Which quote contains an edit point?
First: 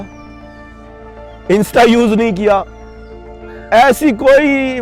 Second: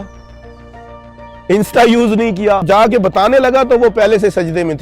second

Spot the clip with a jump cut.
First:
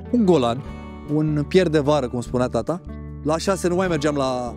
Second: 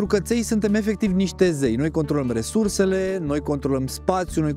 first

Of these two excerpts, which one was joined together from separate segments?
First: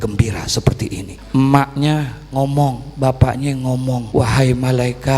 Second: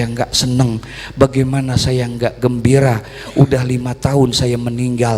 first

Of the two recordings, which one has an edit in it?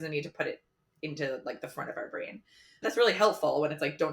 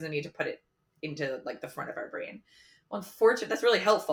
first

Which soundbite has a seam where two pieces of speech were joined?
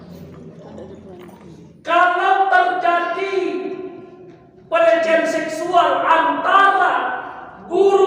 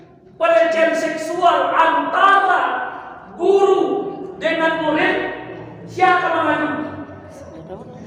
first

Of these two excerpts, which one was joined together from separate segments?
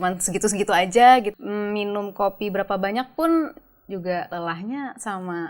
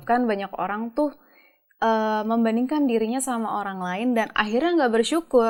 first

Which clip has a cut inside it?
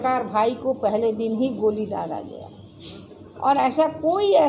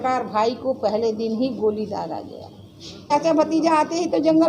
second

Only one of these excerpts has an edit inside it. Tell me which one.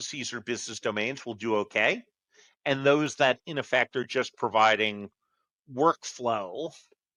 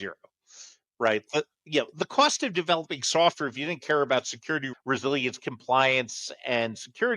second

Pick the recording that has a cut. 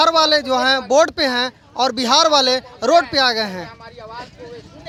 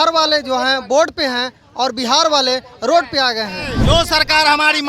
second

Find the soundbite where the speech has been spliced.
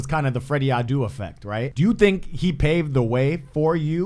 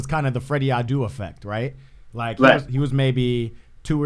first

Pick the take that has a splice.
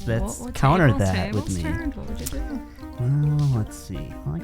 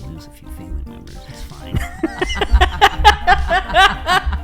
first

